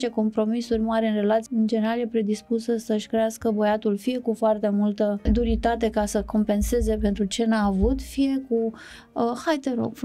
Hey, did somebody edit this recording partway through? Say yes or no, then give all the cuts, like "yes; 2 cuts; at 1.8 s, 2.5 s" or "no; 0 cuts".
yes; 2 cuts; at 1.5 s, 5.2 s